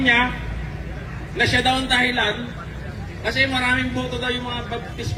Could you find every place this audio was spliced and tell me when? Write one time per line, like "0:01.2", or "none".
none